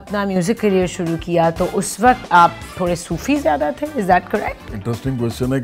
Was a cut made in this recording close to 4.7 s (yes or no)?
yes